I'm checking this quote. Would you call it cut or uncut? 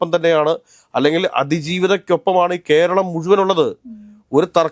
uncut